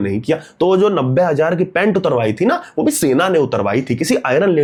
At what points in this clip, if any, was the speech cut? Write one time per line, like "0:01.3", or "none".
none